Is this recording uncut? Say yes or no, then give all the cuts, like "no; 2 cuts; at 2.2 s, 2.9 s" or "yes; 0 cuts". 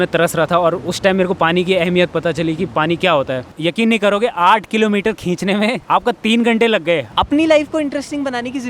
no; 3 cuts; at 3.5 s, 5.8 s, 7.1 s